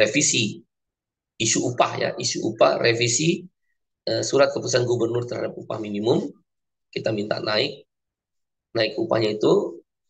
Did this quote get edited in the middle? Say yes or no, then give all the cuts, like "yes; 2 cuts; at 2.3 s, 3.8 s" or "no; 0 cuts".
no; 0 cuts